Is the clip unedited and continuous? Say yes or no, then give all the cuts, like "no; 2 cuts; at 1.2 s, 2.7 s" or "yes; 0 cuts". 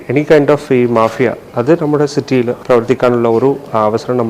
no; 1 cut; at 2.6 s